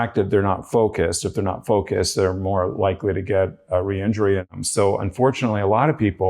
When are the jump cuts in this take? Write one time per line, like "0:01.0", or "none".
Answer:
0:04.5